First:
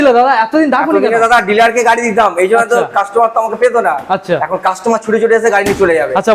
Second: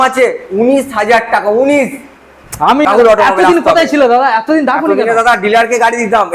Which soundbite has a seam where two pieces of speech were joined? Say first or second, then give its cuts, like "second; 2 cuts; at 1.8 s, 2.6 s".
second; 1 cut; at 2.8 s